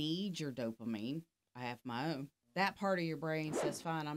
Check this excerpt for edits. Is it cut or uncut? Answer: cut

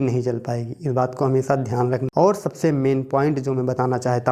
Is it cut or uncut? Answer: cut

